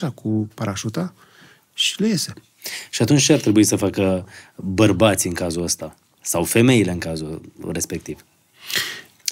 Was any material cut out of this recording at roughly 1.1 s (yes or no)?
no